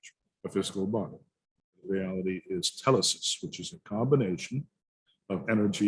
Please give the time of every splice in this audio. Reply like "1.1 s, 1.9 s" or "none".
1.8 s